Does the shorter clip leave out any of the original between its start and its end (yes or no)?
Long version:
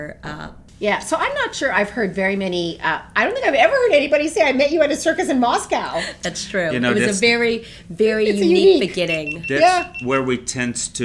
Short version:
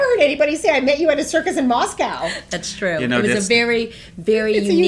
no